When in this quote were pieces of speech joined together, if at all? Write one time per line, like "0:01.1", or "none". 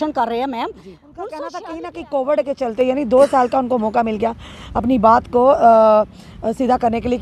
0:01.3